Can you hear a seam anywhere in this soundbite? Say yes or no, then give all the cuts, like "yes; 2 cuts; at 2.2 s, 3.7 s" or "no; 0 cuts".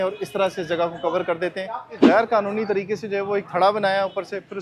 yes; 1 cut; at 2.0 s